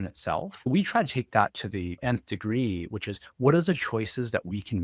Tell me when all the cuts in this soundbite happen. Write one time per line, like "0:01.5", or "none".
0:00.7
0:02.0